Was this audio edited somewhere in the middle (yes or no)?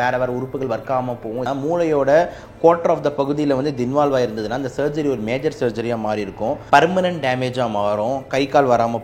yes